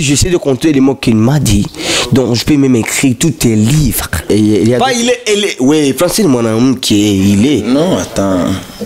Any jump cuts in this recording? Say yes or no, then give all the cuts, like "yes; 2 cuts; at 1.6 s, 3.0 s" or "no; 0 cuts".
yes; 1 cut; at 4.3 s